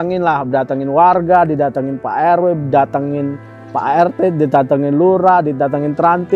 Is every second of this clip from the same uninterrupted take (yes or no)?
yes